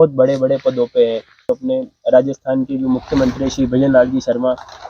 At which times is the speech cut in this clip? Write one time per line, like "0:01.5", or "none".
0:01.4